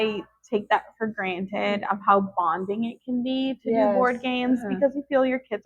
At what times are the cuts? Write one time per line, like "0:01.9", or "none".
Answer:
none